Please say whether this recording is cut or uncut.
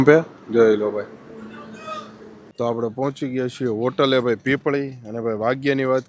cut